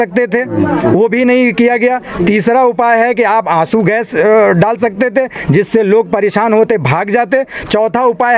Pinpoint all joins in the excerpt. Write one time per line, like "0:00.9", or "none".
none